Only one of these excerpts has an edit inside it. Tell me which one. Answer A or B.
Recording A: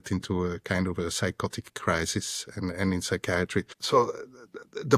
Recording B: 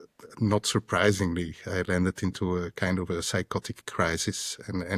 A